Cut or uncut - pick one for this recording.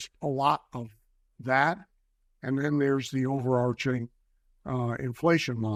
uncut